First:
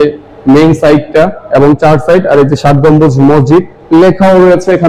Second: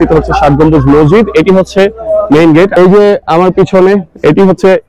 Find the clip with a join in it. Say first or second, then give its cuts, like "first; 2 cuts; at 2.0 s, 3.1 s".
second; 1 cut; at 2.7 s